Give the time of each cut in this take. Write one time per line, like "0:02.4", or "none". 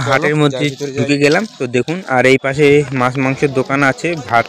none